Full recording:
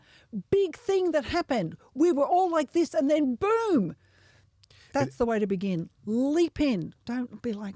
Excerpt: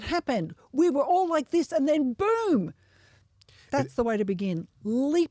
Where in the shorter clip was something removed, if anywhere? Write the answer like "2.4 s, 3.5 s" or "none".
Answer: none